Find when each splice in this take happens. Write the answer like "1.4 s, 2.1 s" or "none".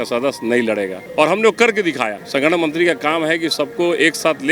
2.1 s